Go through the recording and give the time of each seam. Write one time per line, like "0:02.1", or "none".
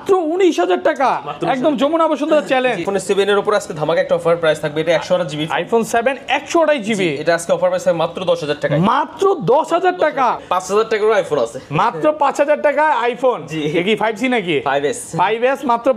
0:02.8
0:10.4